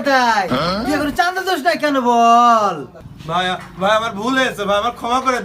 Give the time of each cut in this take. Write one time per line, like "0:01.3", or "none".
none

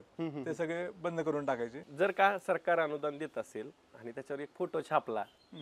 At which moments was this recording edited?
0:01.8

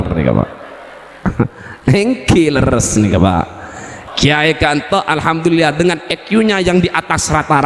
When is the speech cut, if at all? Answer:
0:03.9

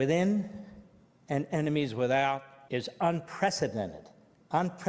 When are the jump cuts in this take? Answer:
0:02.5

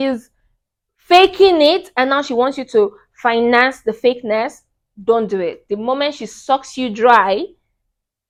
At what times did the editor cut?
none

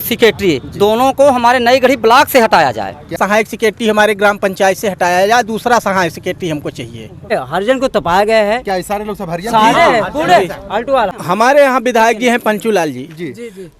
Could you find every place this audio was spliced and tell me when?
0:03.2
0:07.3
0:11.1

